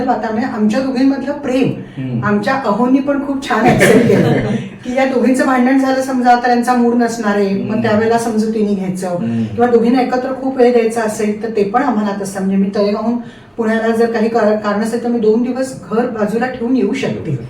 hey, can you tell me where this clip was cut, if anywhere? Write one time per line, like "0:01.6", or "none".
none